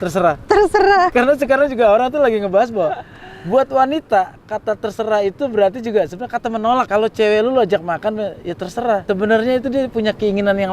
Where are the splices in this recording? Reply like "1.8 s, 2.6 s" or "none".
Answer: 1.1 s, 6.9 s, 9.0 s

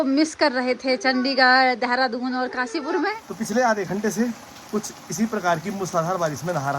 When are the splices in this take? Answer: 3.1 s

